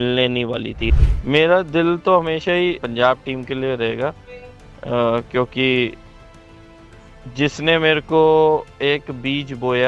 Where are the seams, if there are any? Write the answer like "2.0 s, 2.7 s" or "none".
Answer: 0.9 s, 2.8 s